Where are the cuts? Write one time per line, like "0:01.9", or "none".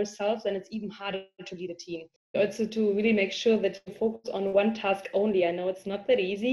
0:02.4